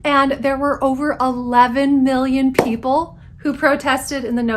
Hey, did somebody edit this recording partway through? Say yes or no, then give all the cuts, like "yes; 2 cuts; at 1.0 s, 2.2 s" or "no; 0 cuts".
no; 0 cuts